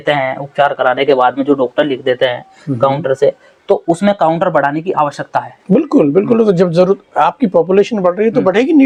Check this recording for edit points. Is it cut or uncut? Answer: uncut